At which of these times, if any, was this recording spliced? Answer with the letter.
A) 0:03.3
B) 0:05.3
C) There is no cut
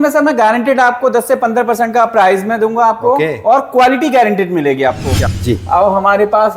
B